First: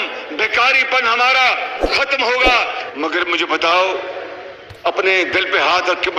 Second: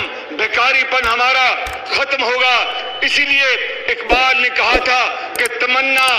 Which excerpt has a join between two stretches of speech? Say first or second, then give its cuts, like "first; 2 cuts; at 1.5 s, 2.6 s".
first; 1 cut; at 2.8 s